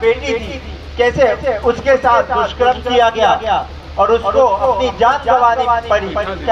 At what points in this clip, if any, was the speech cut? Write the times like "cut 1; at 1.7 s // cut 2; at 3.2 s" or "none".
none

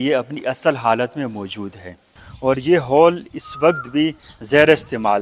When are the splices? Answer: cut 1; at 2.2 s

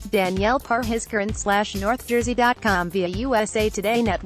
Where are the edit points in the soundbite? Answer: none

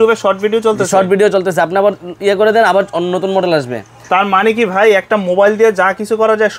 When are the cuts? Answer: none

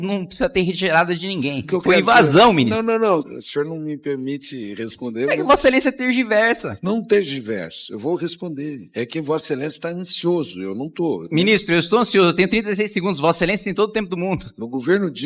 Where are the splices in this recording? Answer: cut 1; at 1.6 s // cut 2; at 3.3 s // cut 3; at 11.2 s // cut 4; at 14.5 s

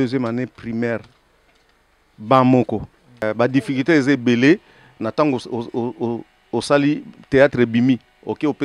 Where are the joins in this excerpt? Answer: cut 1; at 3.2 s

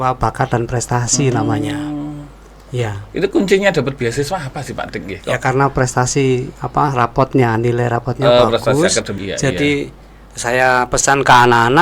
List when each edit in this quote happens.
cut 1; at 9.2 s

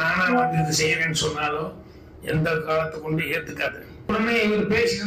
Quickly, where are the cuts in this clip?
cut 1; at 4.1 s

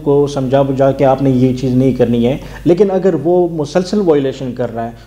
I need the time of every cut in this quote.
cut 1; at 1.0 s

